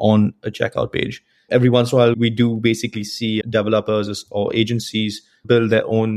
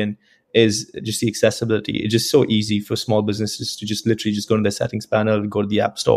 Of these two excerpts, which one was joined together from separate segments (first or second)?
first